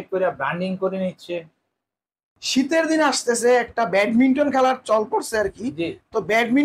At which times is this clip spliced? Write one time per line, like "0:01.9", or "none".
0:02.4